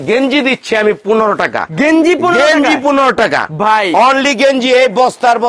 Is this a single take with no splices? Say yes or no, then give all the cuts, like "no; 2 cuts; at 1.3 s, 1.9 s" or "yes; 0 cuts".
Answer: yes; 0 cuts